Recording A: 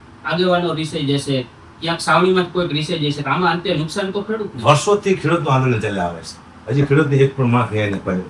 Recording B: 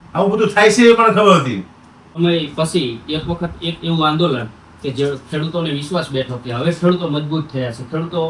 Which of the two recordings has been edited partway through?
B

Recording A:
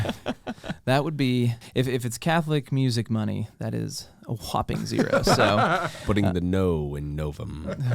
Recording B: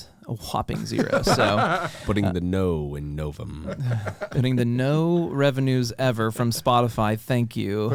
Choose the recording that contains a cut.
A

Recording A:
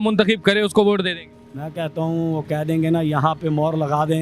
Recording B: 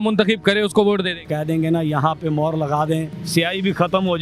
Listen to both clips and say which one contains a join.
B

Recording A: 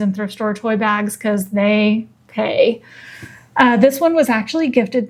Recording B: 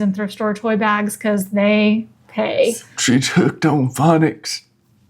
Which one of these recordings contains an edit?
B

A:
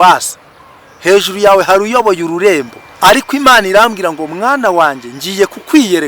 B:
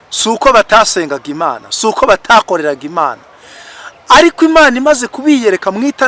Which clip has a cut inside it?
A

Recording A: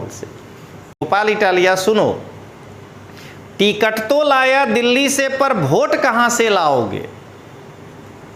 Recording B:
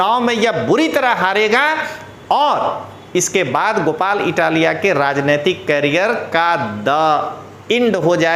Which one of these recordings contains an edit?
A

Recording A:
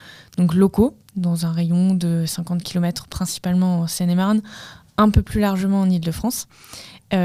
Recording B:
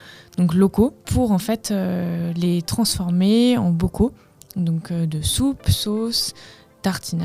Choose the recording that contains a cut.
B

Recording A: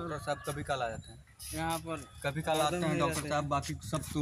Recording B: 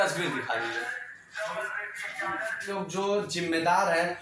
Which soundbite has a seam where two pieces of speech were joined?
B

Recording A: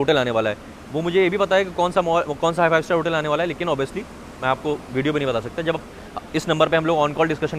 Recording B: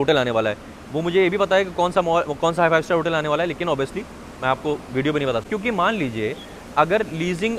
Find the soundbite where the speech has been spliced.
B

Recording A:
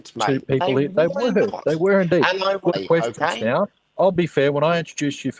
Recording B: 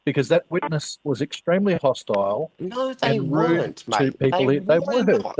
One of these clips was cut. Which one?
A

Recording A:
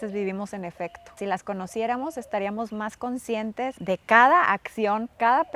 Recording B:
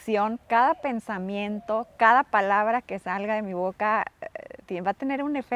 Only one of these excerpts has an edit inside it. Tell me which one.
A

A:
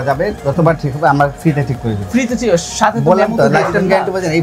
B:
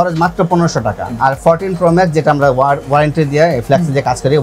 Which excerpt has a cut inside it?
B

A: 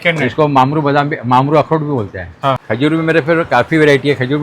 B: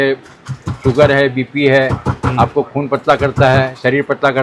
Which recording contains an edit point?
A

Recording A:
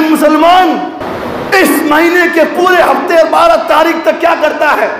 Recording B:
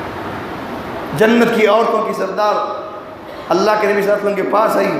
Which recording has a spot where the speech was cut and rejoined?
A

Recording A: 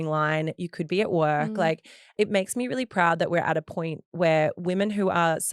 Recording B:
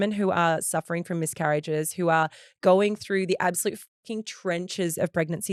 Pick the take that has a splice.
A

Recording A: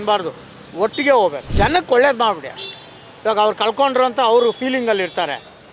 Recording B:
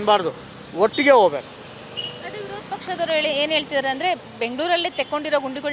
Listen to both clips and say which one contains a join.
A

